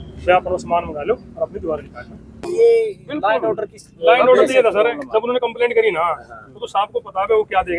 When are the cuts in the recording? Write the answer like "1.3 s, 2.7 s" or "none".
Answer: 2.5 s